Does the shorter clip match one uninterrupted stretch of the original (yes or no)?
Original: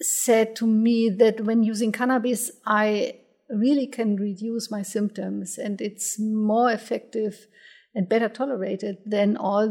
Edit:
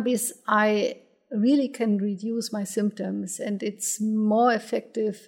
yes